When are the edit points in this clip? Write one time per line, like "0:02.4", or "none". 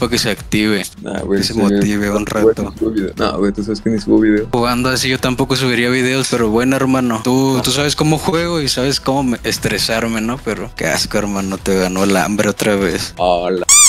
none